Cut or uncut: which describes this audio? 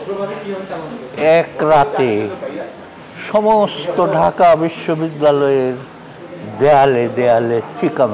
uncut